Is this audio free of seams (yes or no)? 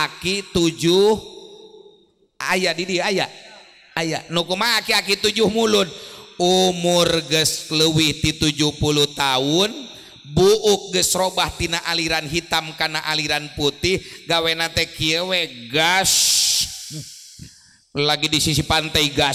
yes